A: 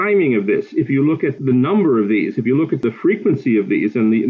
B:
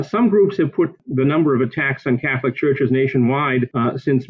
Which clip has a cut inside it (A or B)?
A